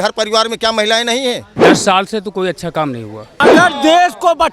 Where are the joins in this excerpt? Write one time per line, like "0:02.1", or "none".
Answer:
0:01.5
0:03.4